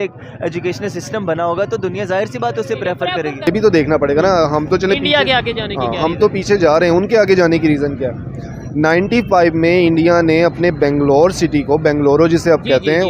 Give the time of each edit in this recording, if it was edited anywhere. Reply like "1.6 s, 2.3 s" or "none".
3.5 s